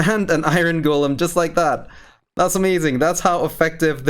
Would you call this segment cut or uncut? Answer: cut